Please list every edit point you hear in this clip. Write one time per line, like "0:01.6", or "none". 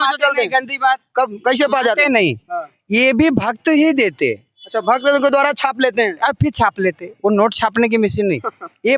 none